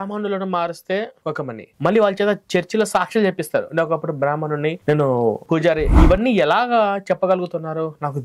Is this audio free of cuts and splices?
no; 1 cut; at 1.7 s

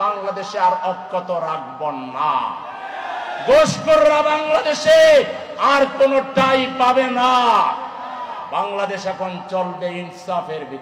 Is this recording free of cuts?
yes; 0 cuts

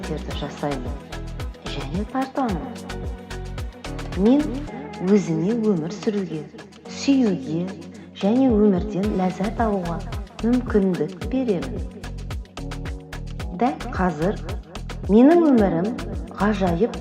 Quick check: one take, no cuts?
yes; 0 cuts

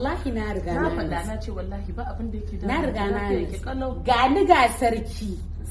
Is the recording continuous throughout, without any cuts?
yes; 0 cuts

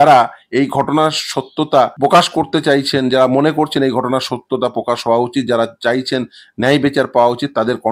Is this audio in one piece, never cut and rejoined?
no; 1 cut; at 1.9 s

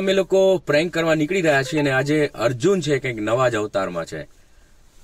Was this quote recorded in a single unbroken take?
yes; 0 cuts

